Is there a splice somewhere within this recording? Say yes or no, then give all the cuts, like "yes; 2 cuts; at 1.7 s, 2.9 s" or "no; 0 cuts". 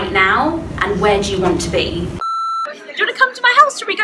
yes; 1 cut; at 2.4 s